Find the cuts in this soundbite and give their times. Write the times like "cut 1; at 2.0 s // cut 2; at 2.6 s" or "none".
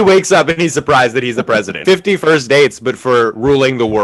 cut 1; at 1.8 s

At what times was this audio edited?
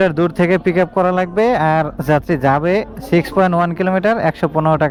none

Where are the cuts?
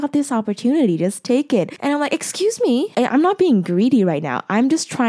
cut 1; at 1.7 s // cut 2; at 2.9 s

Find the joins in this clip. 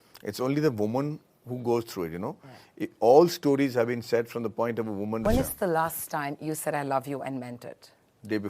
cut 1; at 5.2 s

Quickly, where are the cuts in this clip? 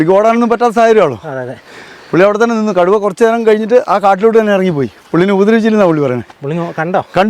none

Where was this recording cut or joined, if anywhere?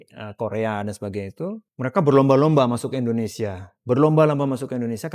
cut 1; at 1.7 s

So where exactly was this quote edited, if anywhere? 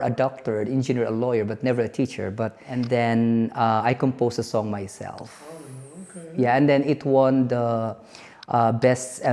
cut 1; at 2.7 s

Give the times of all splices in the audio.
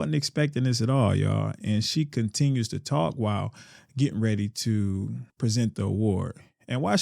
cut 1; at 5.2 s

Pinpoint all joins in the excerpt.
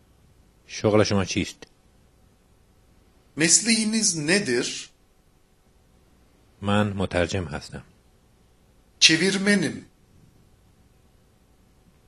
none

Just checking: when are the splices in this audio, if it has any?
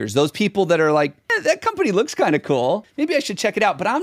cut 1; at 1.3 s // cut 2; at 2.9 s

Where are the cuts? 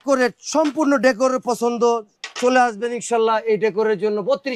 none

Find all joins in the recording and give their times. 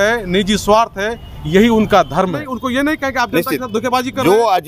cut 1; at 2.4 s

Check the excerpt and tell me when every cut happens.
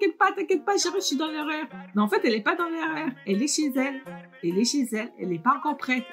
none

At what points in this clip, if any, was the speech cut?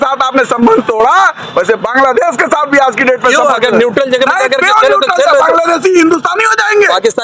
none

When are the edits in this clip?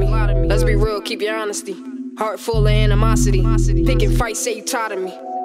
none

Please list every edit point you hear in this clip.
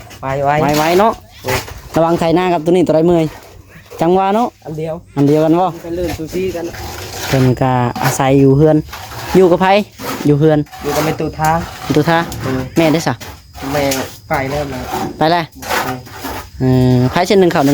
cut 1; at 6.8 s

